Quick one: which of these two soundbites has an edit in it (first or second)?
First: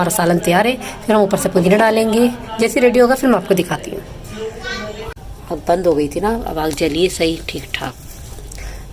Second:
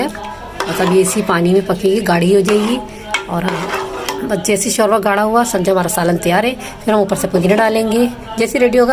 first